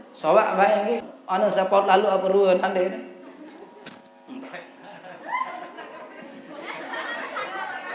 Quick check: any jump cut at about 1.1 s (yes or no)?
yes